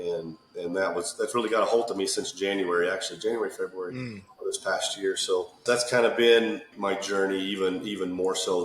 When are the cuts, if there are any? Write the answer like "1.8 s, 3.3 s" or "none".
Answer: 5.6 s, 6.7 s